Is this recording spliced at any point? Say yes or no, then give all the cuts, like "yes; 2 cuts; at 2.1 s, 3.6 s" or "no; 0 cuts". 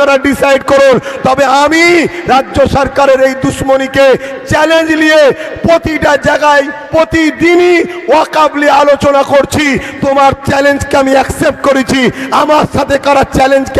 no; 0 cuts